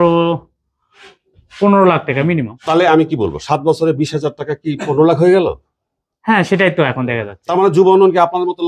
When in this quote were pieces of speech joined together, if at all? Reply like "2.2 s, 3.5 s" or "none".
2.5 s, 7.3 s